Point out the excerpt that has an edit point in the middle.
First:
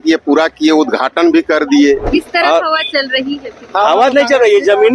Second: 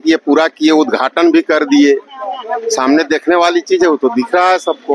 first; 1 cut; at 2.0 s

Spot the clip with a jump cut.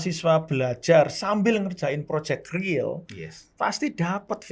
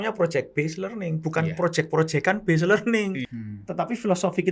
second; 1 cut; at 3.2 s

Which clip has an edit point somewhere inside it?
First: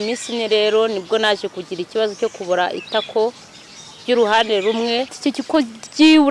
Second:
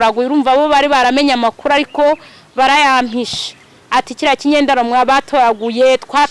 first; 1 cut; at 5.2 s

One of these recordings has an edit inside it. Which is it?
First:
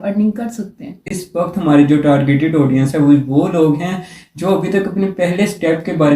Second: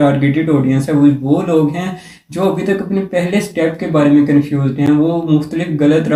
first; 1 cut; at 1.1 s

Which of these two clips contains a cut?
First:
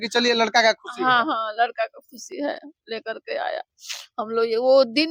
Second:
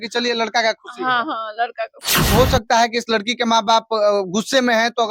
second; 1 cut; at 2.3 s

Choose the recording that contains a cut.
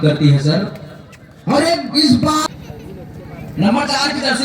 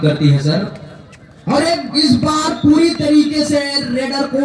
first; 1 cut; at 2.4 s

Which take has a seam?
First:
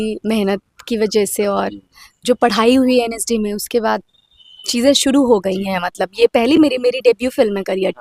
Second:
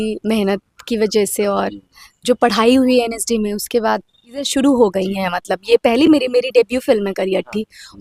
second; 1 cut; at 4.5 s

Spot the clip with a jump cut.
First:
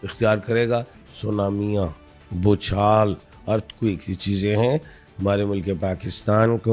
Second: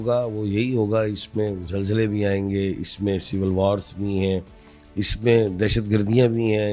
first; 1 cut; at 1.0 s

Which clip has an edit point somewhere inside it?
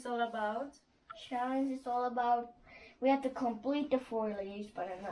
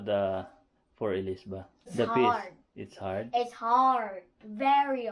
second; 1 cut; at 1.9 s

